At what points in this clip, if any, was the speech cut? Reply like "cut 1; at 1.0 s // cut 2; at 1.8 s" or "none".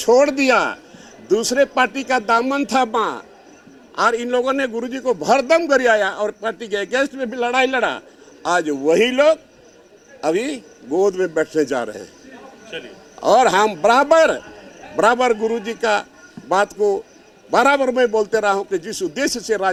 none

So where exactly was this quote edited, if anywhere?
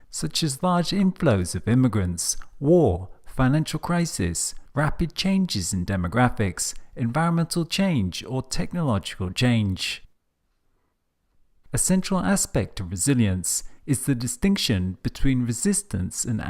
cut 1; at 12.1 s

